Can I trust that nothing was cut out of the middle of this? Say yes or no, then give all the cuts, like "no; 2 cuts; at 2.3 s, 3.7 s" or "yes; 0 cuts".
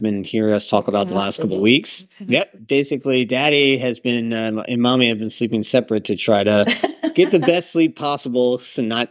no; 1 cut; at 2.6 s